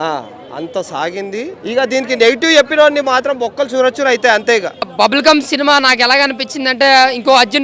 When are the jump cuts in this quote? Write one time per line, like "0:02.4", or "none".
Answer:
0:01.5
0:04.8